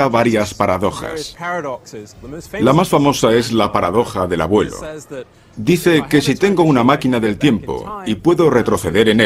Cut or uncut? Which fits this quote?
uncut